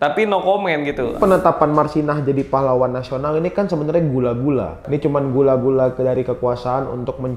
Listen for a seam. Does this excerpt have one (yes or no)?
yes